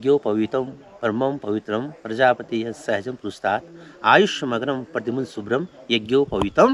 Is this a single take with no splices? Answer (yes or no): yes